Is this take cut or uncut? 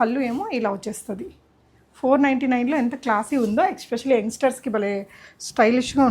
uncut